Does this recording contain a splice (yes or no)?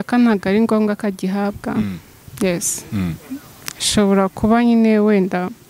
no